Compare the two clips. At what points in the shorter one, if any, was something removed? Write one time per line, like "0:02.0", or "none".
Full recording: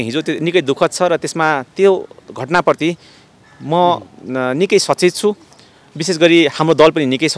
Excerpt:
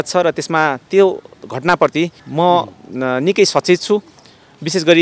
0:02.2